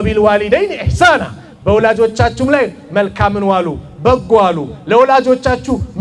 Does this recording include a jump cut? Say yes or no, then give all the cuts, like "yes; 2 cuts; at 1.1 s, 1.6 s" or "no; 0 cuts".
no; 0 cuts